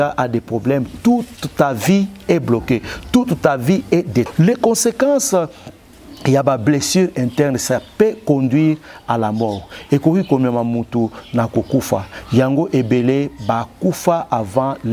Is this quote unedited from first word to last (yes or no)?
no